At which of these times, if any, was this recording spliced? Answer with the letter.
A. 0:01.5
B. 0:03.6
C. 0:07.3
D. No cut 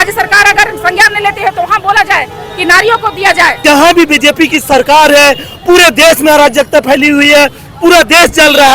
B